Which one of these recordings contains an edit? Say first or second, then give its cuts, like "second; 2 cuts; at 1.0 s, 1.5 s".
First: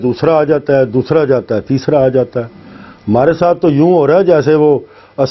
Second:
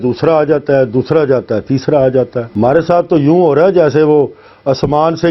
second; 1 cut; at 2.4 s